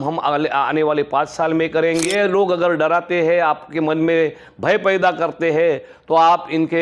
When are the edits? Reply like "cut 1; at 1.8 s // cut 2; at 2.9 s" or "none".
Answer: cut 1; at 2.1 s